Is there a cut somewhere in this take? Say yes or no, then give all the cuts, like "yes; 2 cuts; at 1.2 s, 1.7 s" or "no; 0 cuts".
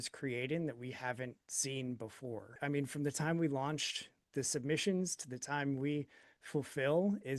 yes; 1 cut; at 2.6 s